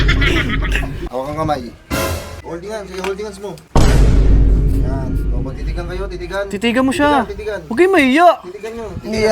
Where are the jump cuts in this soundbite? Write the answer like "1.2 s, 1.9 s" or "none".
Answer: 1.0 s, 2.3 s